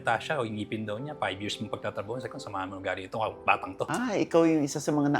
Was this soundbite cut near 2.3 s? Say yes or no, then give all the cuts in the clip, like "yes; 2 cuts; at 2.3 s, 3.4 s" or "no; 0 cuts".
no; 1 cut; at 3.9 s